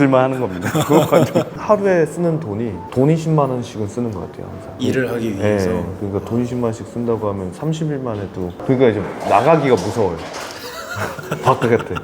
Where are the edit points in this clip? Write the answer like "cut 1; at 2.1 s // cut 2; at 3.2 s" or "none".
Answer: cut 1; at 1.6 s